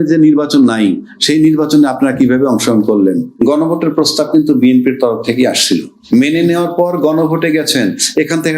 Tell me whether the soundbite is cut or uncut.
cut